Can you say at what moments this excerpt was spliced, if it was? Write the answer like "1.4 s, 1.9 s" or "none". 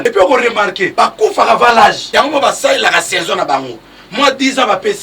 0.8 s, 2.0 s